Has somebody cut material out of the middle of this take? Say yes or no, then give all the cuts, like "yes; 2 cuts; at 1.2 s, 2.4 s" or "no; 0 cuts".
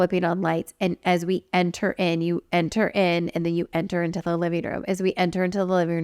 no; 0 cuts